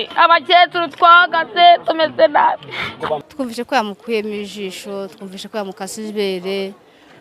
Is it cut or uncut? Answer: cut